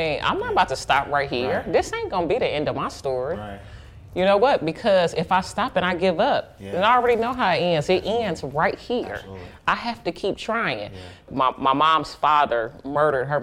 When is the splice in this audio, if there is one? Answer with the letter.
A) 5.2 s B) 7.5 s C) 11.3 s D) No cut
C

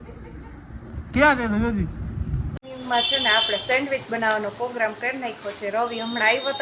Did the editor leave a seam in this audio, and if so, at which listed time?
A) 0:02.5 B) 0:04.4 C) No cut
A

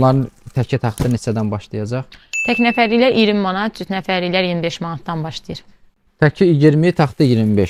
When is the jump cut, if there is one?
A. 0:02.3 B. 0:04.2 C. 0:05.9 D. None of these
D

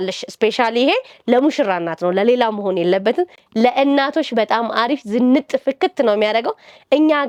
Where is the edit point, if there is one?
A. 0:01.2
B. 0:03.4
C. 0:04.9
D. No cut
D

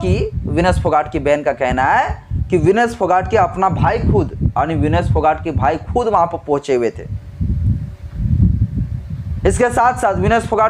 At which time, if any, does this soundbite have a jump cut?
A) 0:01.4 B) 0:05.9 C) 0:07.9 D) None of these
D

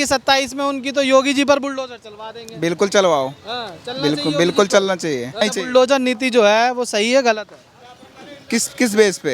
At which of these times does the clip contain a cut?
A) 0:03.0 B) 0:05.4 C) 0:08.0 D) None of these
B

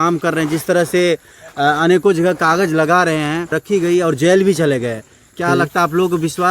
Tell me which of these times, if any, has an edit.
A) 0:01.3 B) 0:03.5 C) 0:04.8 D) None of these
B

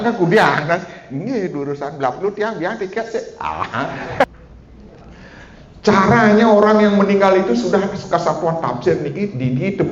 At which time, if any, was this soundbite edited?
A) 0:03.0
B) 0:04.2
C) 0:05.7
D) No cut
B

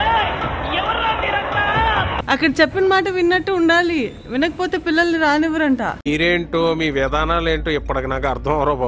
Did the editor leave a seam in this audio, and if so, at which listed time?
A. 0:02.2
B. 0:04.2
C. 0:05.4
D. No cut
A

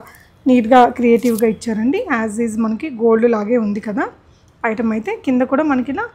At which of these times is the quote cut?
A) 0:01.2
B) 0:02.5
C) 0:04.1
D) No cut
D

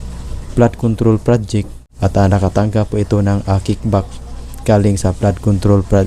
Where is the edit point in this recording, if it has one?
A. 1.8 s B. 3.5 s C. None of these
A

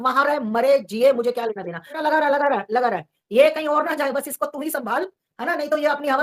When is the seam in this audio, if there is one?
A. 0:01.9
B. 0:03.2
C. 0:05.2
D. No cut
A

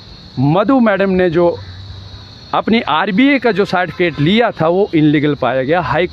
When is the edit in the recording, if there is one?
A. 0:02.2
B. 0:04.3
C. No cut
C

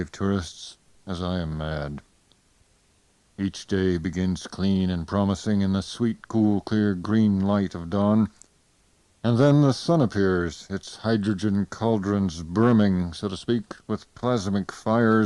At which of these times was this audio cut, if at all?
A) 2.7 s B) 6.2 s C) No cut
C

